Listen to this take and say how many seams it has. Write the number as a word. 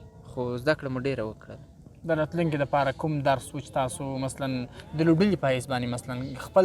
zero